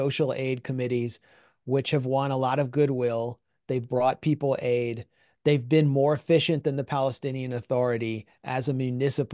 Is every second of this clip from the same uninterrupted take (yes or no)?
yes